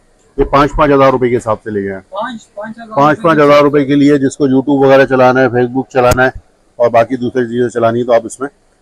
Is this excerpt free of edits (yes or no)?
yes